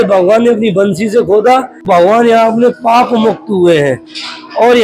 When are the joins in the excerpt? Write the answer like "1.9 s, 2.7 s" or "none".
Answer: 1.8 s